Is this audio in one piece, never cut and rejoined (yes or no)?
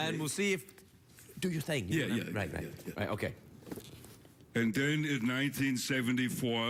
yes